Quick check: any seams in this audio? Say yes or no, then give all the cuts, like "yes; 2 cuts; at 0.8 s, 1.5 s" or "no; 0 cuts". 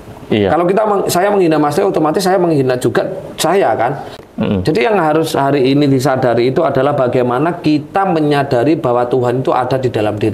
yes; 1 cut; at 4.2 s